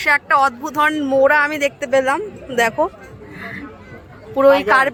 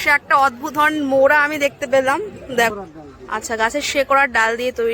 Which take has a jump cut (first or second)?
second